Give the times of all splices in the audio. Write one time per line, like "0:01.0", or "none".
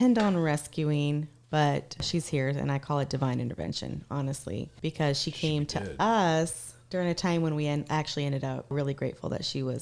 0:02.1
0:04.7
0:08.7